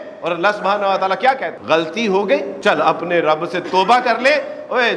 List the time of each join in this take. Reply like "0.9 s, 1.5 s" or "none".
1.5 s, 2.5 s